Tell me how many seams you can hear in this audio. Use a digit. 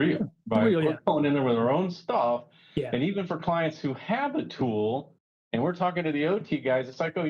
0